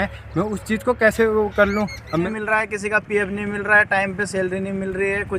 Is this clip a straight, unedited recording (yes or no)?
no